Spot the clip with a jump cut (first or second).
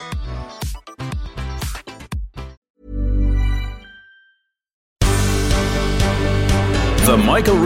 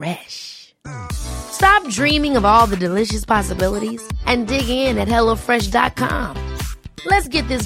first